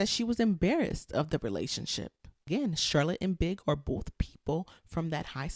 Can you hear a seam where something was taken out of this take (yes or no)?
no